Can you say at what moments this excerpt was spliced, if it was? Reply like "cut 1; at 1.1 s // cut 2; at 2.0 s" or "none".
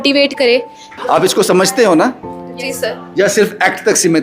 cut 1; at 1.0 s